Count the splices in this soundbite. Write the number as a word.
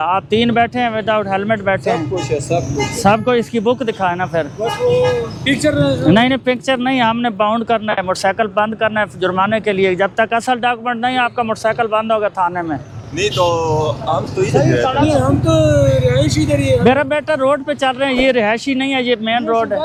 zero